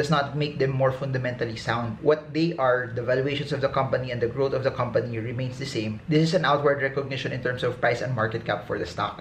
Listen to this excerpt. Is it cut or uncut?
uncut